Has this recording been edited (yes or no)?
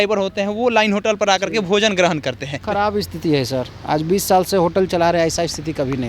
yes